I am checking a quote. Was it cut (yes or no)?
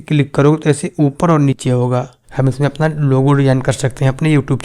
yes